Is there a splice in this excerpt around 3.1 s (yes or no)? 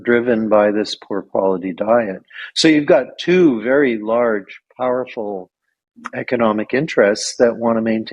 no